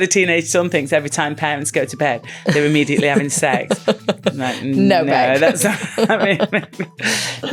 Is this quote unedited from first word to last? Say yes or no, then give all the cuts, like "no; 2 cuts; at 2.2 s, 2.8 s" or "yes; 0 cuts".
yes; 0 cuts